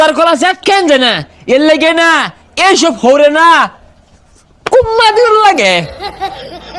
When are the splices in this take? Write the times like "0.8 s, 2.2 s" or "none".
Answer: 5.8 s